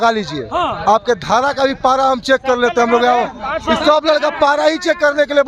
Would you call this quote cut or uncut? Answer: uncut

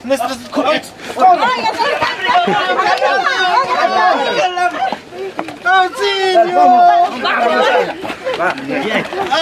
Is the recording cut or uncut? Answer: uncut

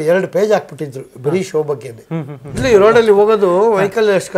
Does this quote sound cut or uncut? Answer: cut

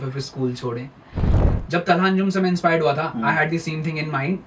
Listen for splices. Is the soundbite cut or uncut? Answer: cut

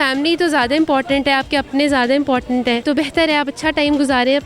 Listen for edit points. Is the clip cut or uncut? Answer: cut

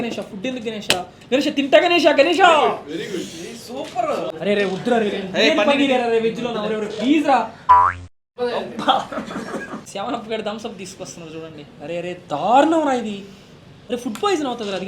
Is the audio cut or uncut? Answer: cut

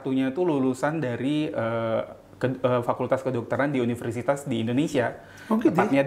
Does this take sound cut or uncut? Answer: uncut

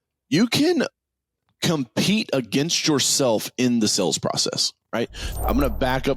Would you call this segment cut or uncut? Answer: cut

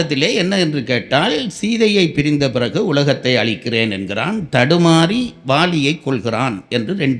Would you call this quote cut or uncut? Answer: uncut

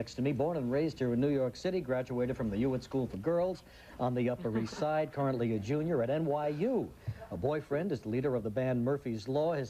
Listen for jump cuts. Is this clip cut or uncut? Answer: cut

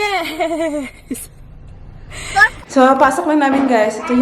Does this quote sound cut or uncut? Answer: cut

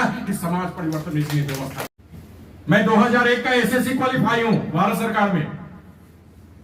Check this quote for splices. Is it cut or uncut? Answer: cut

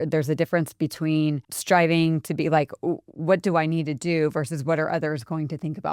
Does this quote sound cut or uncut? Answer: cut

